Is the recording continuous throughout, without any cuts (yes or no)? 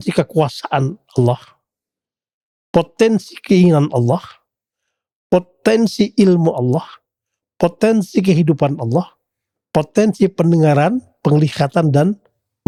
yes